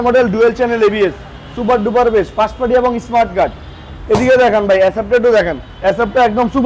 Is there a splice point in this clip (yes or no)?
no